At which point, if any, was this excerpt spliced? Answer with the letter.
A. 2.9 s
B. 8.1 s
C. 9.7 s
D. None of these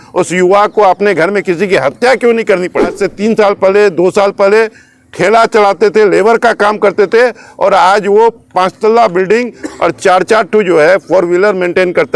A